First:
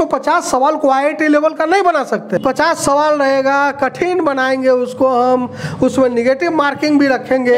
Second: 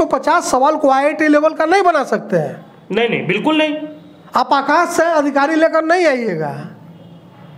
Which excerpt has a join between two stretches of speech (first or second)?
first